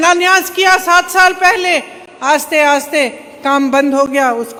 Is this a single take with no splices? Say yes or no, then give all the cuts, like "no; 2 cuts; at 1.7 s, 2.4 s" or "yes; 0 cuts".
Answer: yes; 0 cuts